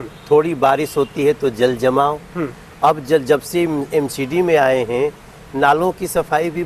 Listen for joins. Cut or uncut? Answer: uncut